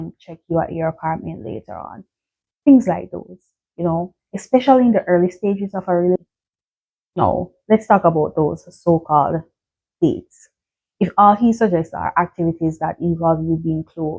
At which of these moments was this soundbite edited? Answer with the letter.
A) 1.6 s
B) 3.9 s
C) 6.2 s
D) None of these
C